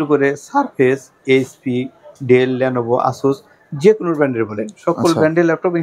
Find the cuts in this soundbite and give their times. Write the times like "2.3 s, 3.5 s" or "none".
none